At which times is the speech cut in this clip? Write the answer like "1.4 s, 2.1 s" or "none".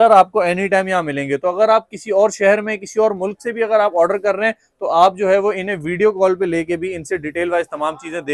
none